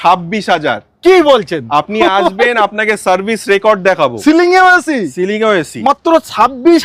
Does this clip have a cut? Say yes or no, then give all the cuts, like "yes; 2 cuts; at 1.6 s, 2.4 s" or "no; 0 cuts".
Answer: no; 0 cuts